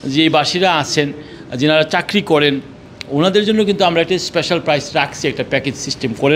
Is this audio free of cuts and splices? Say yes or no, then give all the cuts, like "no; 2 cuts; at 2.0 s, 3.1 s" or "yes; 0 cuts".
yes; 0 cuts